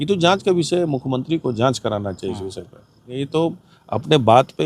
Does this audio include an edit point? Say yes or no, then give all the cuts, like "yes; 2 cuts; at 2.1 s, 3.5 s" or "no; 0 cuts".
yes; 1 cut; at 3.2 s